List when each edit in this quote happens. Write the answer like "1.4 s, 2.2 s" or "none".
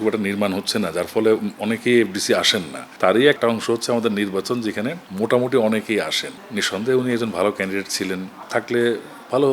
2.9 s, 6.2 s, 8.4 s